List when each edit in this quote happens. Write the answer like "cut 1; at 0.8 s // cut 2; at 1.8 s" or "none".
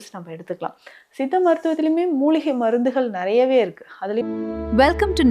cut 1; at 4.2 s